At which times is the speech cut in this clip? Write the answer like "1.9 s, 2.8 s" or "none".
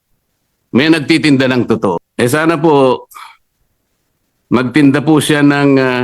2.1 s